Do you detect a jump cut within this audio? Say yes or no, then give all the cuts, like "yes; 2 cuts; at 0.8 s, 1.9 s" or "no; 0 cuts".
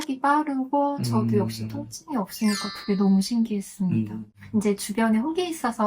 yes; 1 cut; at 4.4 s